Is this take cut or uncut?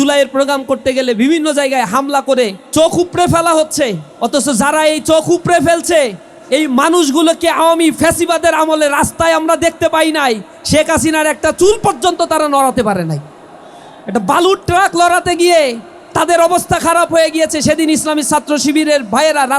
cut